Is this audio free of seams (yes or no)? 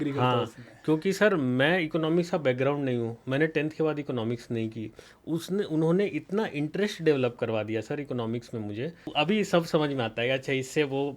no